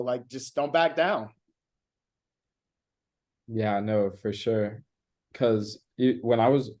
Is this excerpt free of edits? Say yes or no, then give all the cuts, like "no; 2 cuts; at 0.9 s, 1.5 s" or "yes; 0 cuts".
yes; 0 cuts